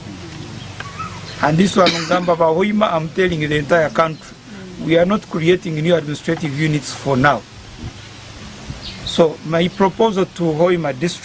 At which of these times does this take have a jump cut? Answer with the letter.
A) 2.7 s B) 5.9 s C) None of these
C